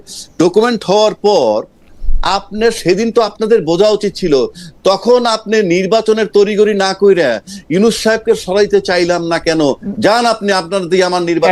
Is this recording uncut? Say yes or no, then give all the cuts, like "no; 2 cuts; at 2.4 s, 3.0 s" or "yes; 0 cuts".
yes; 0 cuts